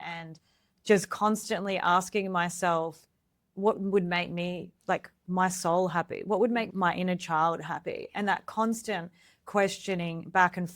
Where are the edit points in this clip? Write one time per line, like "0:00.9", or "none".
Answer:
0:03.4
0:06.7